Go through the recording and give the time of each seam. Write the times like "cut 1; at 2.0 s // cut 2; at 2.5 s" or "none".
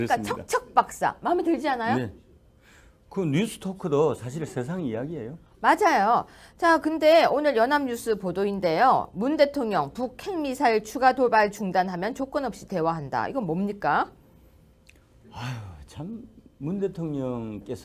none